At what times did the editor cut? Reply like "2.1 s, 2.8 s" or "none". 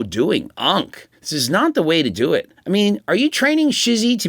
2.5 s